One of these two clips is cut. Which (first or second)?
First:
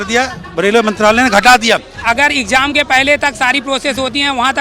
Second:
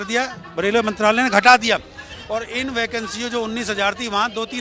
first